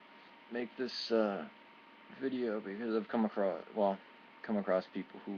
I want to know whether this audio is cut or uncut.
cut